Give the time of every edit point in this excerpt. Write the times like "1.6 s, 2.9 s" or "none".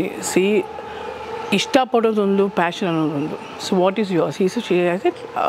none